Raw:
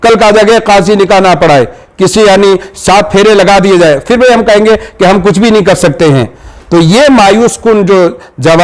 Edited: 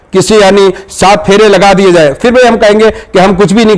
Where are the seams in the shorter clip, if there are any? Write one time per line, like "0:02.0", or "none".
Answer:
none